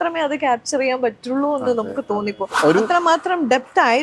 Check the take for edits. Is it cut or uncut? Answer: cut